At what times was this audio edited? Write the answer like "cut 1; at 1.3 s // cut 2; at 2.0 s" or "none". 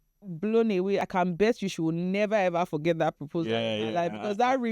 cut 1; at 1.0 s